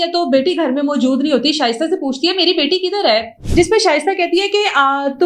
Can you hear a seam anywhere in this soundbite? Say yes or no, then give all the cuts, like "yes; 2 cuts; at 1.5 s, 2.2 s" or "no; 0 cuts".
yes; 1 cut; at 3.4 s